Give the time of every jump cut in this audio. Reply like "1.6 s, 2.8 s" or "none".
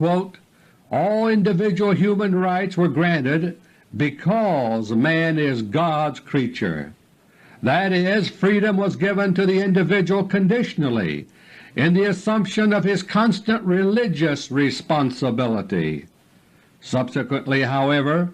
3.9 s